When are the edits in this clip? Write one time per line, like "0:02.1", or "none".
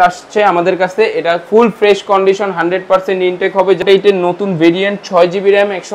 0:03.8